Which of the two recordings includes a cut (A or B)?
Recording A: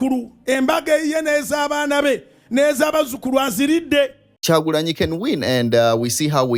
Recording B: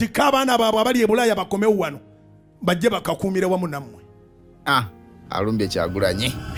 A